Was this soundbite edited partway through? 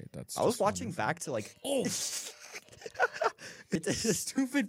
yes; 1 cut; at 3.8 s

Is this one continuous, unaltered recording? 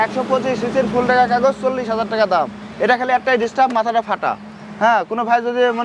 yes; 0 cuts

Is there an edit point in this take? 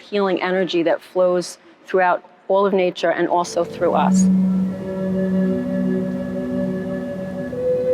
yes; 1 cut; at 4.1 s

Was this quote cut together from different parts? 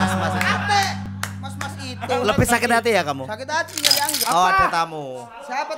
yes; 1 cut; at 4.2 s

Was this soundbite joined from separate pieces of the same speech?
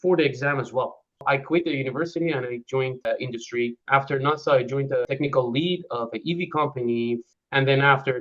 yes; 4 cuts; at 1.2 s, 3.2 s, 5.1 s, 7.3 s

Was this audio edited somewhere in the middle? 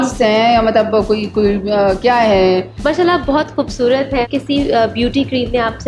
yes; 2 cuts; at 2.7 s, 4.3 s

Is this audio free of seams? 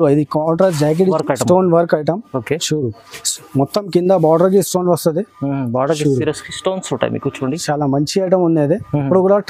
no; 1 cut; at 1.2 s

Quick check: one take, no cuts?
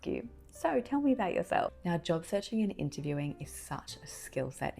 no; 1 cut; at 1.7 s

